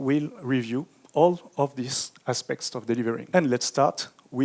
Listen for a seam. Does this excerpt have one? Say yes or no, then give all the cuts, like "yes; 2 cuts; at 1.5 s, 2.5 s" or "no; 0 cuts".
yes; 1 cut; at 3.2 s